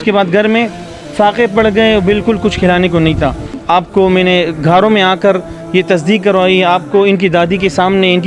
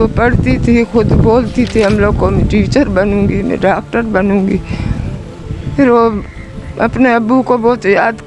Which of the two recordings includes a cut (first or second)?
first